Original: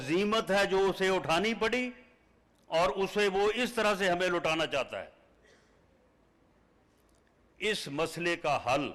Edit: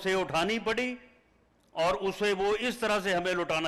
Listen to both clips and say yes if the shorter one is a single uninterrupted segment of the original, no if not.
yes